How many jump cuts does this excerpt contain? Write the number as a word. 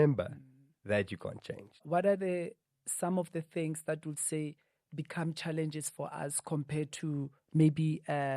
one